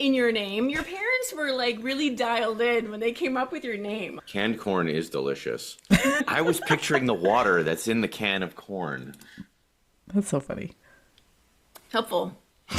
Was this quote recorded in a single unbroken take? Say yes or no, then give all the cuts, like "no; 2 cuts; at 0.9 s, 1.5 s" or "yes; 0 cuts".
no; 1 cut; at 6.2 s